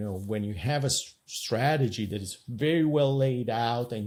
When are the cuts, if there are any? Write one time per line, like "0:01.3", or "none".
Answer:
none